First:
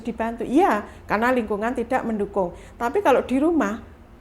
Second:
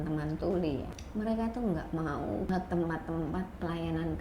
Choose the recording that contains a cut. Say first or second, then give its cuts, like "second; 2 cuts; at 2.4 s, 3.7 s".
second; 2 cuts; at 1.0 s, 2.5 s